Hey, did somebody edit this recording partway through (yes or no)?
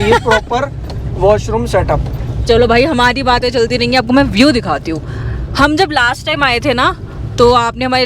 no